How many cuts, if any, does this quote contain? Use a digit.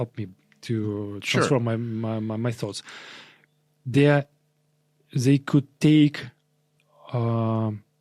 0